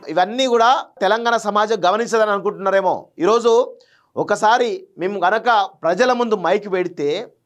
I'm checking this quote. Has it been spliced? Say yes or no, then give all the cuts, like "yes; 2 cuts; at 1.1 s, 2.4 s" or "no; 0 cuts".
yes; 1 cut; at 1.0 s